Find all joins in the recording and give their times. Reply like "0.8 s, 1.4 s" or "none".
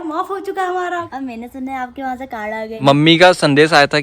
1.1 s, 2.8 s